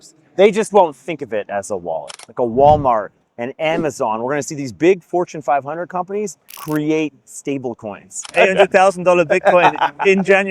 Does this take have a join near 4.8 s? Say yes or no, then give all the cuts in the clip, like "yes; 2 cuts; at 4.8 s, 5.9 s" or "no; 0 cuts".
no; 2 cuts; at 2.1 s, 8.3 s